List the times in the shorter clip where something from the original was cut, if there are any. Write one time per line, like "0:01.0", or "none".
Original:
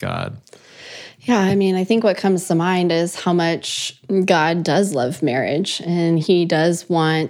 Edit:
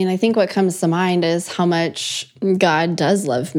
none